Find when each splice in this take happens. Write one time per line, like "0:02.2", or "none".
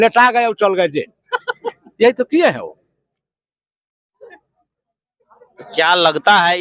none